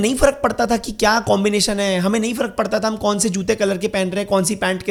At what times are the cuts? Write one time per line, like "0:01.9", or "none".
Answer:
none